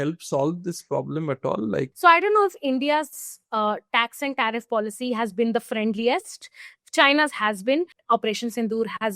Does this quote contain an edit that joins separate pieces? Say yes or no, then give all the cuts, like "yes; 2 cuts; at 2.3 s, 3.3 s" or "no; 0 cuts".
yes; 2 cuts; at 1.9 s, 8.0 s